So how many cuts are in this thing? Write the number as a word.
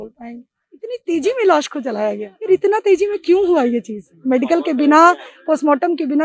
two